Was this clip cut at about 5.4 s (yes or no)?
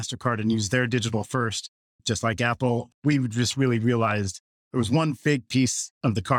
no